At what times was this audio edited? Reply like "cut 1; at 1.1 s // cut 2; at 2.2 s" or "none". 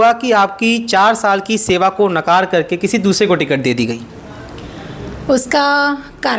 none